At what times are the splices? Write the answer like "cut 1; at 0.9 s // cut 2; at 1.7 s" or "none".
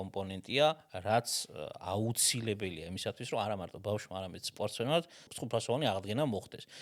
cut 1; at 5.3 s